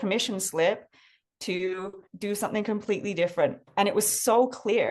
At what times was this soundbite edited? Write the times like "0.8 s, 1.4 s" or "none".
2.0 s, 3.6 s